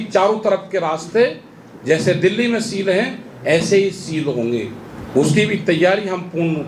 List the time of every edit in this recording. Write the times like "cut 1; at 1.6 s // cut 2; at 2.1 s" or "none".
none